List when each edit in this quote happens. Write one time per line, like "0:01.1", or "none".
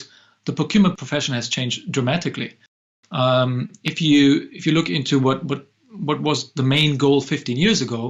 0:01.0